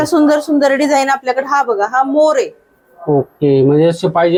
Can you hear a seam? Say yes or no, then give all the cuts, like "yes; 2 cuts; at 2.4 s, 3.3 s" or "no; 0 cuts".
no; 0 cuts